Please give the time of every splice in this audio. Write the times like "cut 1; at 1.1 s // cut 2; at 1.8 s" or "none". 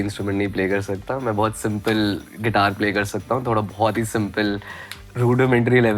none